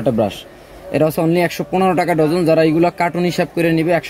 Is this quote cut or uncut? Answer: uncut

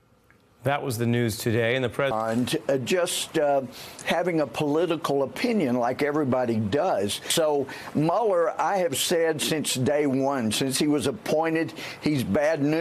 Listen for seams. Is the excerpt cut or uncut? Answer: uncut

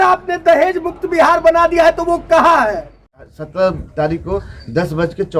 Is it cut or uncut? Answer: cut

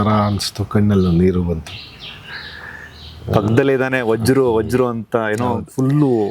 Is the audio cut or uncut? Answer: uncut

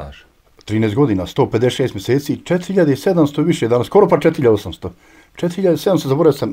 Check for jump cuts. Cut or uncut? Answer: uncut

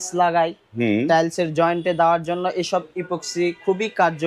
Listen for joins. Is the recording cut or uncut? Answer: uncut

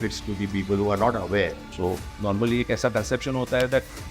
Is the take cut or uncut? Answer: cut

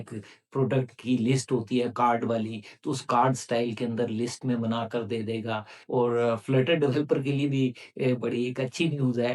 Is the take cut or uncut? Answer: cut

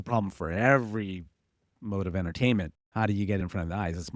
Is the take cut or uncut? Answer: cut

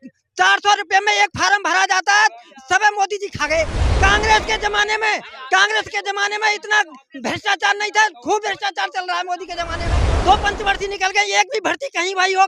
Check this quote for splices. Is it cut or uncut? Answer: cut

